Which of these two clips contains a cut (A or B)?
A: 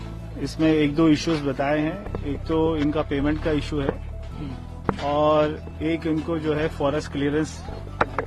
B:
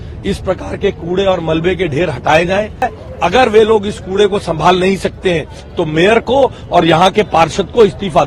B